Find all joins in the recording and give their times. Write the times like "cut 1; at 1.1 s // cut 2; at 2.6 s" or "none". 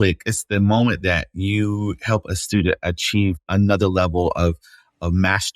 cut 1; at 3.4 s